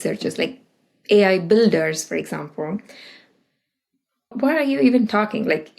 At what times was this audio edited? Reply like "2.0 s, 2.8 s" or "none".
4.3 s